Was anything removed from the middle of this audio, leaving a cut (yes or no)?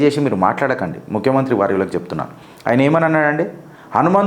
no